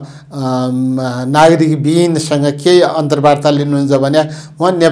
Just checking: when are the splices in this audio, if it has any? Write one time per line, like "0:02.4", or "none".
none